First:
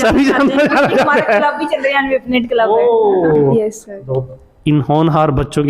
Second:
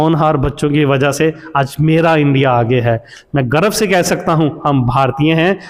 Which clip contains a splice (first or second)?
first